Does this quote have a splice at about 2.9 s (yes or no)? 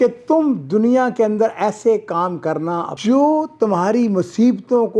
yes